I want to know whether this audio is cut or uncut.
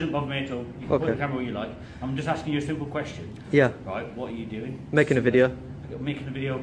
uncut